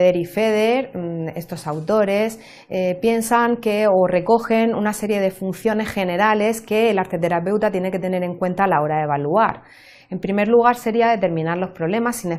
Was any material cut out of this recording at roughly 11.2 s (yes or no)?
no